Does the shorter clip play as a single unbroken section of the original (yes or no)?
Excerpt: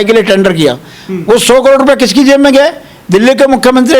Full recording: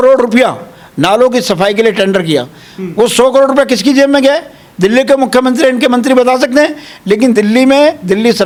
yes